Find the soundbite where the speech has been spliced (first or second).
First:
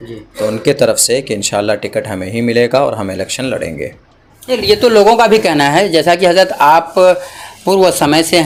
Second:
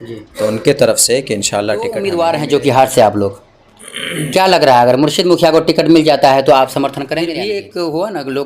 second